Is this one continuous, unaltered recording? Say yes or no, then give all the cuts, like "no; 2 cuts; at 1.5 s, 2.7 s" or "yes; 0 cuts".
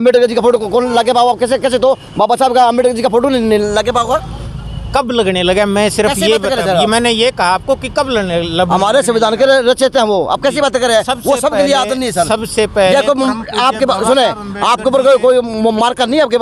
yes; 0 cuts